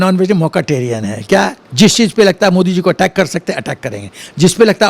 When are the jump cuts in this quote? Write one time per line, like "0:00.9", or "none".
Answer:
0:01.6